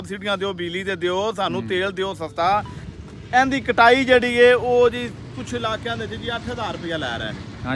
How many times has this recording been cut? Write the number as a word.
one